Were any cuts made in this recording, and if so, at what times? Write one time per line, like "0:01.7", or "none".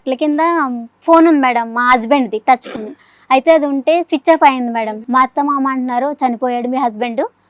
0:04.8